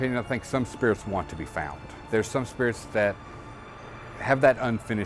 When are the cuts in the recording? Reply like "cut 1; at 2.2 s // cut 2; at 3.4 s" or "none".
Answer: cut 1; at 2.0 s